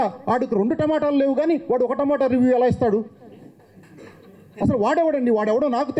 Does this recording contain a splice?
no; 0 cuts

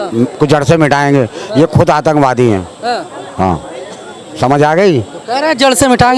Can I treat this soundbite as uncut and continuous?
yes; 0 cuts

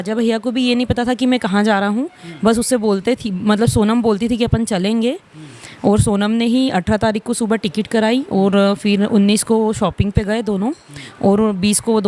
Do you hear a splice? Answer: no; 0 cuts

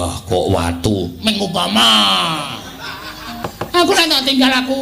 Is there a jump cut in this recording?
yes; 1 cut; at 3.4 s

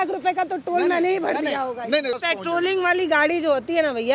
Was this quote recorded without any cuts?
no; 1 cut; at 2.1 s

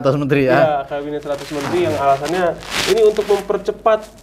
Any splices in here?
no; 0 cuts

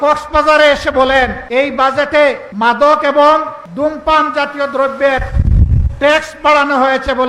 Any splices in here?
yes; 3 cuts; at 1.4 s, 2.5 s, 3.6 s

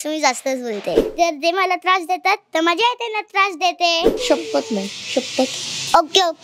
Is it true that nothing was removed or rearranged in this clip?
no; 2 cuts; at 1.1 s, 4.1 s

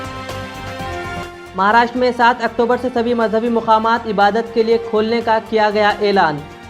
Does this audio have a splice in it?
yes; 1 cut; at 1.2 s

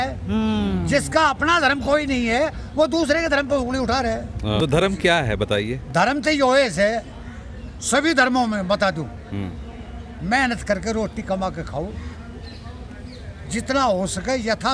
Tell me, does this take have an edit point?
yes; 1 cut; at 4.6 s

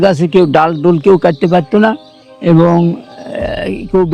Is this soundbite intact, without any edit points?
yes; 0 cuts

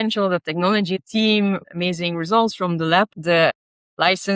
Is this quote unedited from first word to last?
no; 3 cuts; at 1.0 s, 1.7 s, 3.2 s

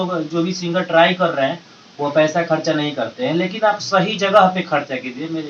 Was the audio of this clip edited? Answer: no; 0 cuts

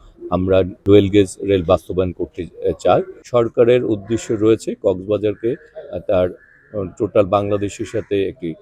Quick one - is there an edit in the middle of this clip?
yes; 2 cuts; at 0.8 s, 3.2 s

